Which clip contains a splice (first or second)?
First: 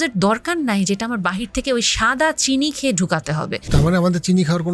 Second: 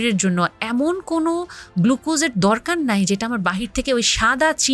first